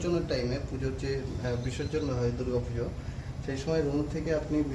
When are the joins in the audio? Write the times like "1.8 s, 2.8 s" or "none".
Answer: none